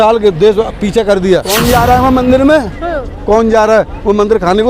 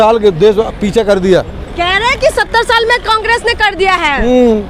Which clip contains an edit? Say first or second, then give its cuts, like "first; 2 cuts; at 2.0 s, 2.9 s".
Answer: first; 1 cut; at 1.6 s